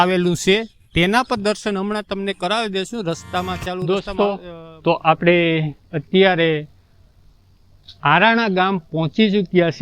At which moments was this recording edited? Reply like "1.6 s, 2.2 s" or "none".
3.8 s